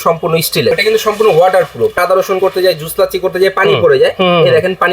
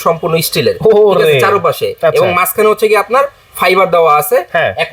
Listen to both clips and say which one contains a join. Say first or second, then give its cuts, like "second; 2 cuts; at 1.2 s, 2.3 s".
first; 2 cuts; at 0.7 s, 2.0 s